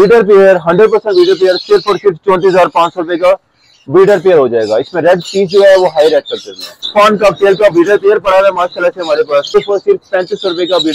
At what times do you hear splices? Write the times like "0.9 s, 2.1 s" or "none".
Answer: 6.8 s, 9.6 s